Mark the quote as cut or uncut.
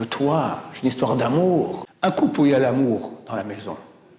cut